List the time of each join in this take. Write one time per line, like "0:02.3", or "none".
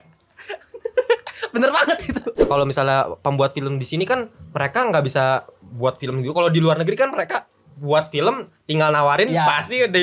0:02.5